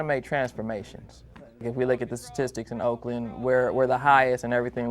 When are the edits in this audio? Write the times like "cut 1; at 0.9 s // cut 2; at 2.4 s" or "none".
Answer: cut 1; at 1.6 s